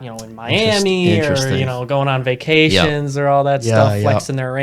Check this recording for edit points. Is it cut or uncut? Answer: uncut